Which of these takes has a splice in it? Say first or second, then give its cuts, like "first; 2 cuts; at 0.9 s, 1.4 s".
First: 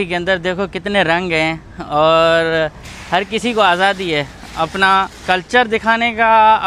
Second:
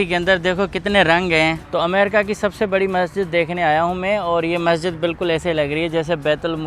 second; 1 cut; at 1.6 s